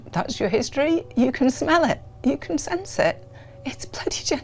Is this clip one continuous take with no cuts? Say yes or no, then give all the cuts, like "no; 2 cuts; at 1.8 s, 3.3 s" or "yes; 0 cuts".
yes; 0 cuts